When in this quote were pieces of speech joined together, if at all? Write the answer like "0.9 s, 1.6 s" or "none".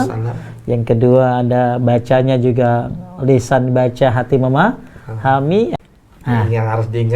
5.7 s